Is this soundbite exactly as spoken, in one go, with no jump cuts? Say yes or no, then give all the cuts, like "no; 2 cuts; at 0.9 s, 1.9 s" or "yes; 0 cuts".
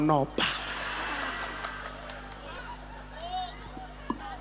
no; 1 cut; at 2.6 s